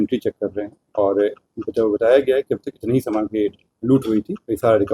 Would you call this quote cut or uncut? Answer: uncut